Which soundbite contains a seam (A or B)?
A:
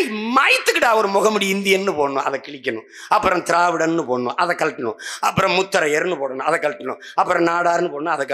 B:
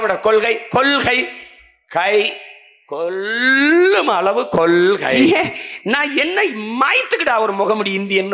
B